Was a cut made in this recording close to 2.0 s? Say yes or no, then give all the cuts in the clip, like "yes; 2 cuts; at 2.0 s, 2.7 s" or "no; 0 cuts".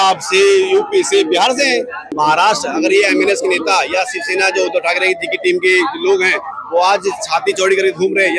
yes; 1 cut; at 2.0 s